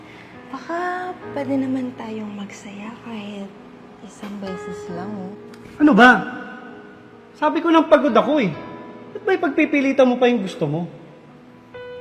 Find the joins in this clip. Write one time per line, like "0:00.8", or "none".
0:05.5

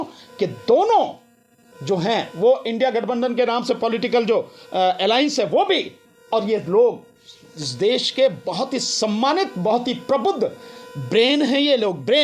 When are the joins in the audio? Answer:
none

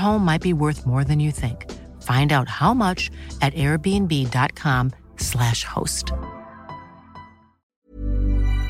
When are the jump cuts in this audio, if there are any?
0:07.7

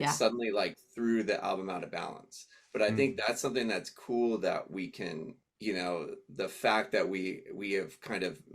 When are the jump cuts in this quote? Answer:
0:05.4

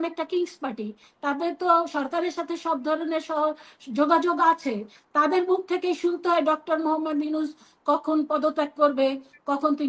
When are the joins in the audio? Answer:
none

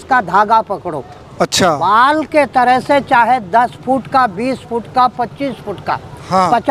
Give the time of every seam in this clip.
none

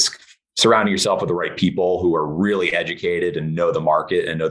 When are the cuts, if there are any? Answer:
none

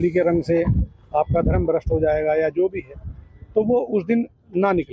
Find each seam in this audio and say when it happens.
0:03.9

